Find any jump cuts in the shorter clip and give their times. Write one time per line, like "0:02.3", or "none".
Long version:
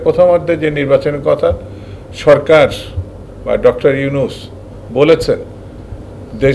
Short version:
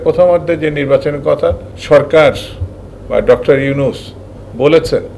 0:01.7